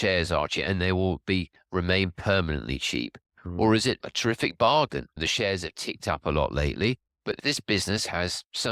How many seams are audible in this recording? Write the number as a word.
one